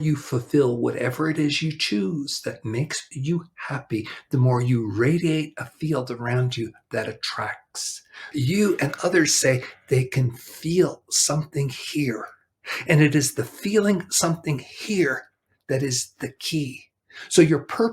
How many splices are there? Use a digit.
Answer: 1